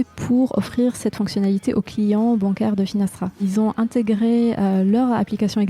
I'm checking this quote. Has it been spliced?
yes; 1 cut; at 3.4 s

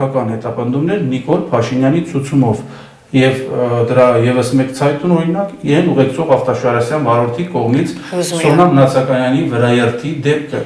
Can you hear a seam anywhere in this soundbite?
no; 0 cuts

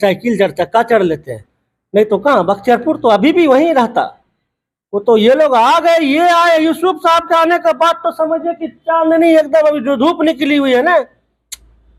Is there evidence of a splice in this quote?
no; 0 cuts

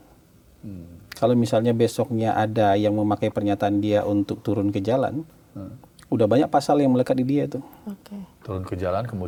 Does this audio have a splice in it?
no; 0 cuts

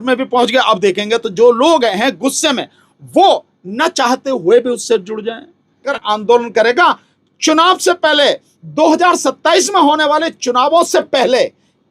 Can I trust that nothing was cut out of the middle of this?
no; 1 cut; at 5.9 s

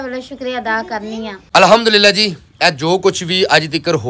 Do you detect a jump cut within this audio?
no; 0 cuts

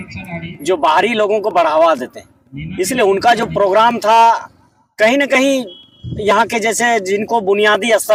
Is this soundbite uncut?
yes; 0 cuts

